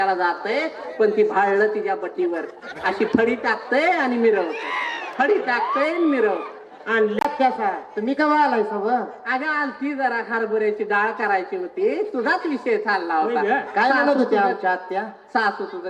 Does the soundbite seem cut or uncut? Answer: cut